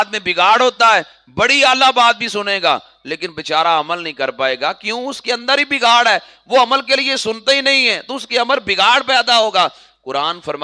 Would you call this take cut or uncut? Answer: uncut